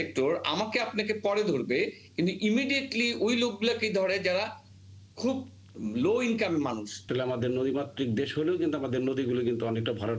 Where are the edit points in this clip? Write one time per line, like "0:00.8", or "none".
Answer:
0:06.9